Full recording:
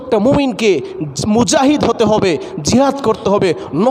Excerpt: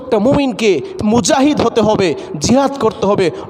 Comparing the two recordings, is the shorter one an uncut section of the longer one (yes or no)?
no